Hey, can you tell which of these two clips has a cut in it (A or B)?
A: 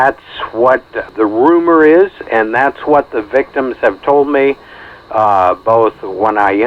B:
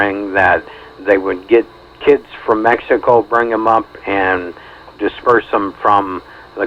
A